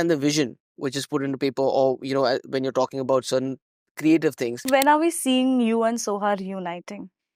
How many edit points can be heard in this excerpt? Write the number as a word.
one